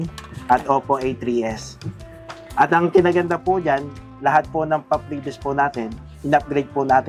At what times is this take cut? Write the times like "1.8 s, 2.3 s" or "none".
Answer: none